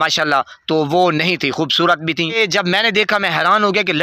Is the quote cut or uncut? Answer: cut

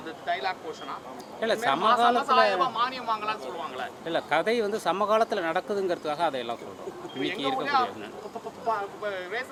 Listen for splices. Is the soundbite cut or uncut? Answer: uncut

